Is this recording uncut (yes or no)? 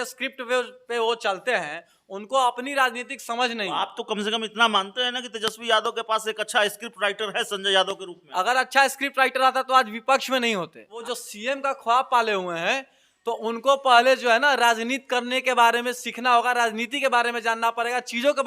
no